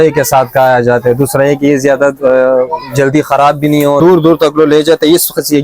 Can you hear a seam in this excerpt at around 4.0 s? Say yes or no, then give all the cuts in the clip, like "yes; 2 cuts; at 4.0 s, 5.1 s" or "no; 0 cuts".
yes; 1 cut; at 4.0 s